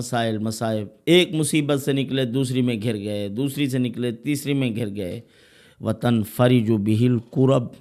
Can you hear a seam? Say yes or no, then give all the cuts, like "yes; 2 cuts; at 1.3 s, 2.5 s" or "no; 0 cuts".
yes; 1 cut; at 0.9 s